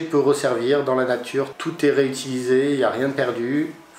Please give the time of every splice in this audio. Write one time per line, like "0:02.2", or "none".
0:01.6